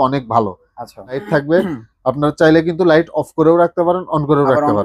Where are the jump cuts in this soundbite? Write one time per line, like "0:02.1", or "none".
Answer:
0:01.2